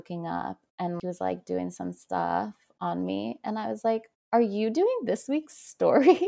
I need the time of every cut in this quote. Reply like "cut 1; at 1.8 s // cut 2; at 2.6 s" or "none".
cut 1; at 1.0 s

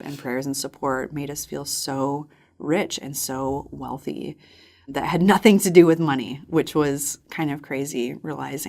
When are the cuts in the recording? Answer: cut 1; at 4.9 s

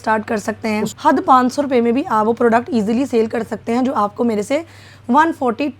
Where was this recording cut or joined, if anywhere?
cut 1; at 0.9 s

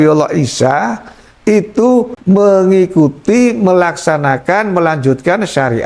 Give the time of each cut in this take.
cut 1; at 2.1 s

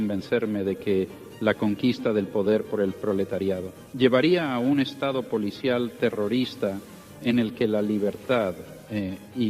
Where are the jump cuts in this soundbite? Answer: cut 1; at 3.8 s

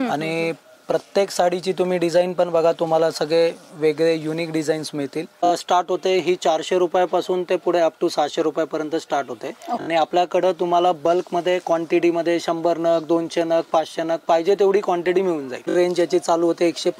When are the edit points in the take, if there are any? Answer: cut 1; at 5.5 s // cut 2; at 9.8 s // cut 3; at 15.7 s

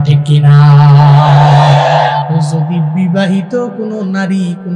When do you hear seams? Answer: cut 1; at 2.3 s

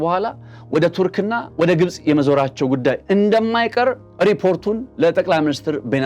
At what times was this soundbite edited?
cut 1; at 4.1 s

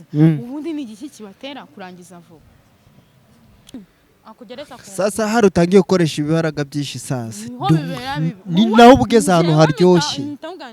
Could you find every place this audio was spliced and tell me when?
cut 1; at 3.7 s

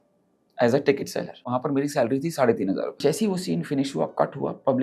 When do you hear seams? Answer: cut 1; at 1.5 s // cut 2; at 3.0 s

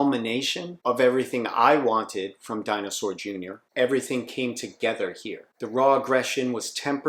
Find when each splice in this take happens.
none

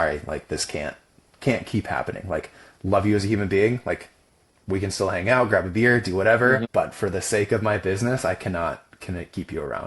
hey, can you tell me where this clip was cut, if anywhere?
cut 1; at 6.6 s

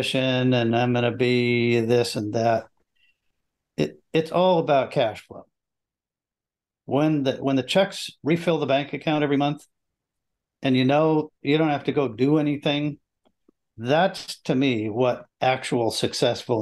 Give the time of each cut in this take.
none

